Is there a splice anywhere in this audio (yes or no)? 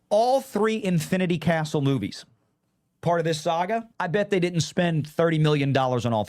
yes